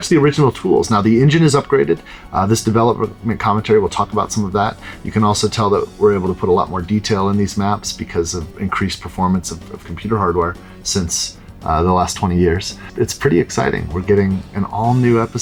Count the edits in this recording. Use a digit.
0